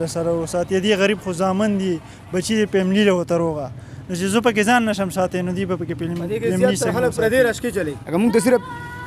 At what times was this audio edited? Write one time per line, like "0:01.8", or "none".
none